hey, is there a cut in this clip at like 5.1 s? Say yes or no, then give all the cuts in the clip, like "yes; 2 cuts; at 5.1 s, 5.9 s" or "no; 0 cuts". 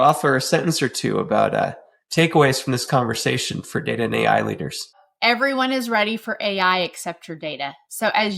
yes; 1 cut; at 5.1 s